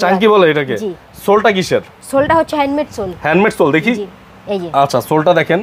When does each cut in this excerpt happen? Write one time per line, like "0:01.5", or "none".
none

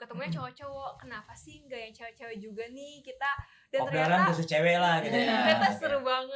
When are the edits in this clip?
none

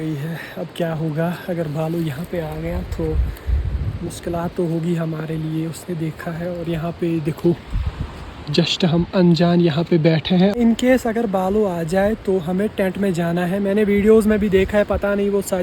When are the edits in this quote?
0:10.6

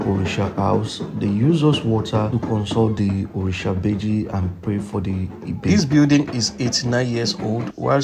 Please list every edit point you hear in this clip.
0:05.7

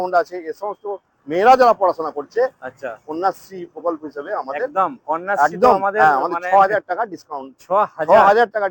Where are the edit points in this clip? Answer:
none

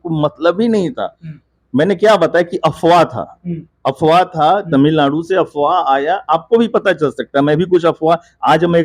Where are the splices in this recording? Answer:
none

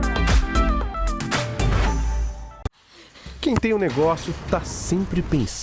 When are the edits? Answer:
0:02.6

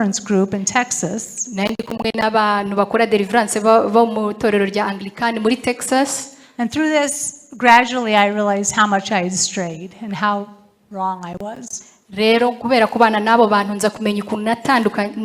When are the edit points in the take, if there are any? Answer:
none

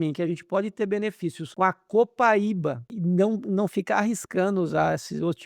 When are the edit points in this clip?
0:01.4
0:02.9

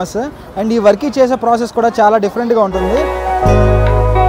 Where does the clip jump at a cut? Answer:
0:03.0

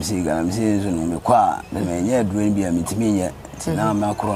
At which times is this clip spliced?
none

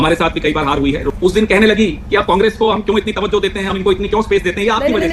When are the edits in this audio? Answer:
0:01.1

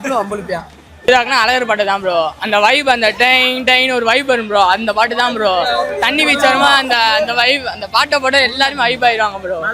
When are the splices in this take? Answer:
0:01.1

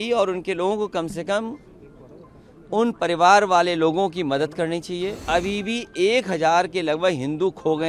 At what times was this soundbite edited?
0:05.2

